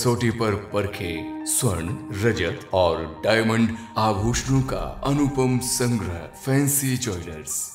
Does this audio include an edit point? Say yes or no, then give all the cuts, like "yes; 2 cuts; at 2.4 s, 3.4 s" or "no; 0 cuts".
no; 0 cuts